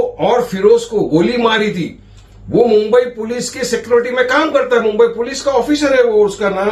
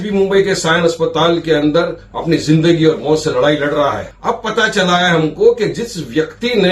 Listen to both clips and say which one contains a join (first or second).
second